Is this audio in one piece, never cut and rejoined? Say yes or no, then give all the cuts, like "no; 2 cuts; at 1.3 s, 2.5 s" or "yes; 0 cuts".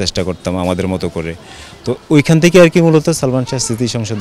yes; 0 cuts